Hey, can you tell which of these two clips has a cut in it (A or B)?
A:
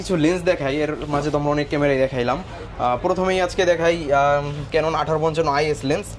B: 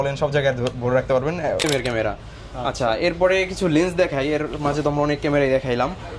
B